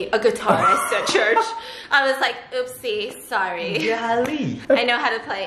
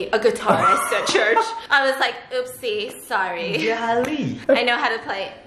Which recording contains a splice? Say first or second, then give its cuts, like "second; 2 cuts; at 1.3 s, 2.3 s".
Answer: second; 1 cut; at 1.6 s